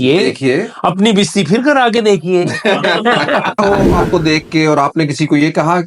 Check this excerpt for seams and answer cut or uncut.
cut